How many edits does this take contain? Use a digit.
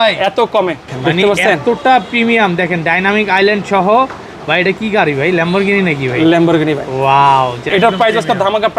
2